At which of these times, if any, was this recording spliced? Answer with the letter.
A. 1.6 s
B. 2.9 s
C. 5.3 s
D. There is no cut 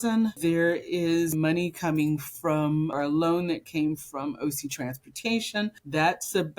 B